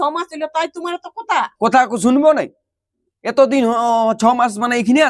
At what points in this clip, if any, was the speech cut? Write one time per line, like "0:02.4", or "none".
none